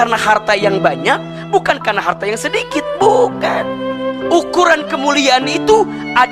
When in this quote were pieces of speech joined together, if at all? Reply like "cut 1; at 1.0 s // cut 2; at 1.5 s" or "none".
cut 1; at 3.9 s